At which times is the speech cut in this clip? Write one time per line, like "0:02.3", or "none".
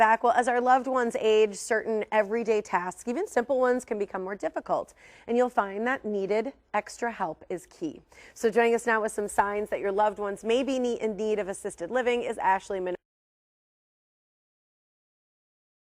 none